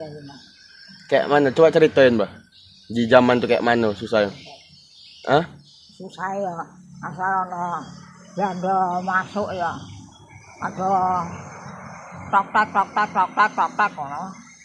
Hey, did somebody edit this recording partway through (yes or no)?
no